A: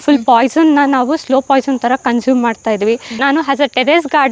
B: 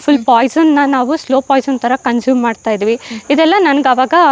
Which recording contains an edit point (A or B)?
A